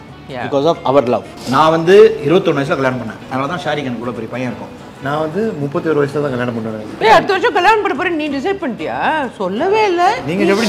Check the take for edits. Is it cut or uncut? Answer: cut